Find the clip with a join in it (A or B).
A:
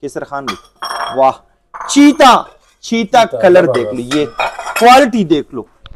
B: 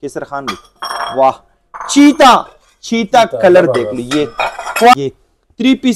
B